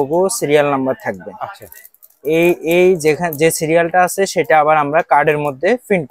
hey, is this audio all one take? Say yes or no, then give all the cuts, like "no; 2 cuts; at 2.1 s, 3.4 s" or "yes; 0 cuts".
yes; 0 cuts